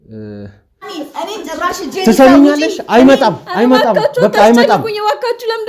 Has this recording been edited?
yes; 1 cut; at 1.0 s

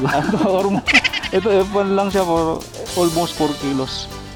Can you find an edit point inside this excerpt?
no; 0 cuts

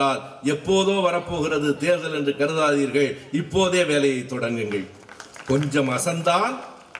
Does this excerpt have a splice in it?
no; 0 cuts

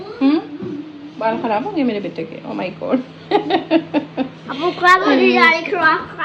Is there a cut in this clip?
no; 0 cuts

